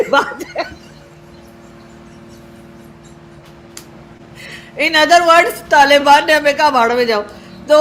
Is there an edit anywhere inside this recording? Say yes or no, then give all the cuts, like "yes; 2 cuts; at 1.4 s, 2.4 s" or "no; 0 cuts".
no; 0 cuts